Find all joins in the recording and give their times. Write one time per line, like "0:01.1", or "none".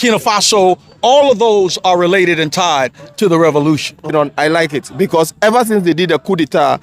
0:04.1

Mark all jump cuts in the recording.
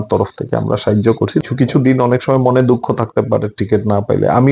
0:01.4

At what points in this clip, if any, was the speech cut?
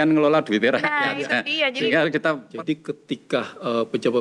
0:02.5

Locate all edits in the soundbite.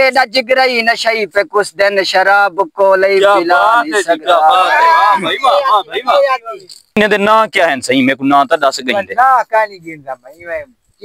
0:06.9

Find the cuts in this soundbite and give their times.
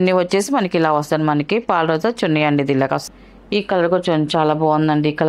0:03.1

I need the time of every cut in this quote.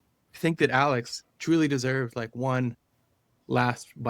none

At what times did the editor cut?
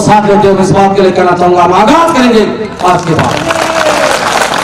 none

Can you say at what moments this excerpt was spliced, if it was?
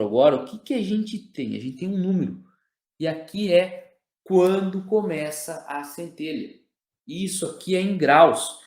0:01.2

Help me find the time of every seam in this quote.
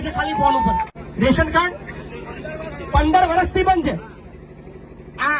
0:01.0

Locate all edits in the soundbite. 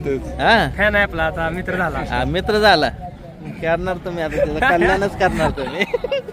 none

